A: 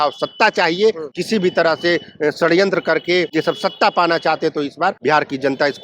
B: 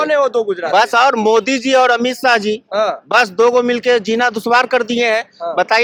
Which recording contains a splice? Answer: A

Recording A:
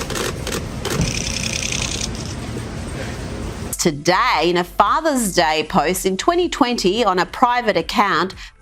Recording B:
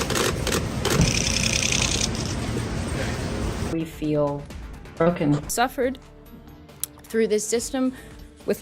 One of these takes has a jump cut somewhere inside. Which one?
B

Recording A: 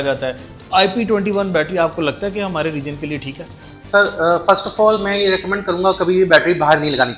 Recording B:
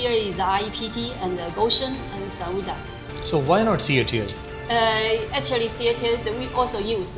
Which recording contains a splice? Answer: B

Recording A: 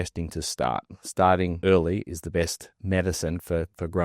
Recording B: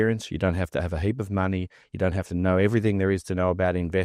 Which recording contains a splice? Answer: A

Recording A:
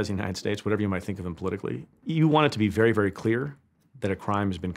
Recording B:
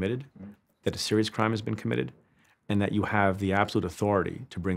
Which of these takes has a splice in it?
A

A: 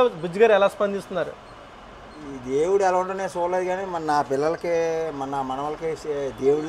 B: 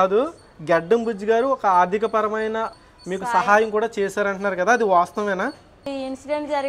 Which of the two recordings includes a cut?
B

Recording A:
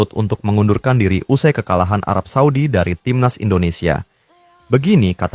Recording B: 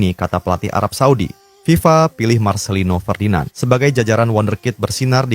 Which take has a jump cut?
B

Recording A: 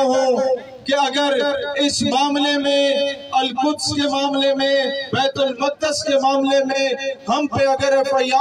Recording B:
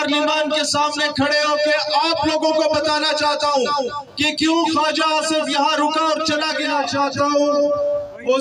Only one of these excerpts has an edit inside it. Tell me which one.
B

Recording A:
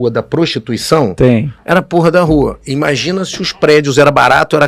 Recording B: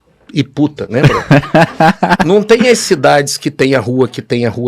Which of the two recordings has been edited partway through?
B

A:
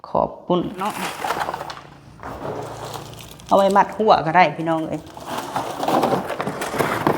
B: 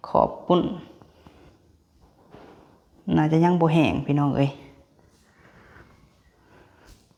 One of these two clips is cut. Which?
A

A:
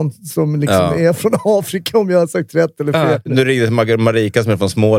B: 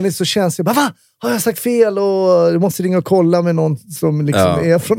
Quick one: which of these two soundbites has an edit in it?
A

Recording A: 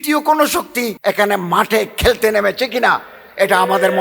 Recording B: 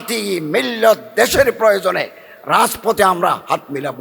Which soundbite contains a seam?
A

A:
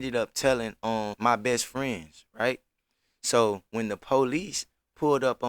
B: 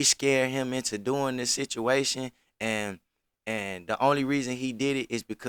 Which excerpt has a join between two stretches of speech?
A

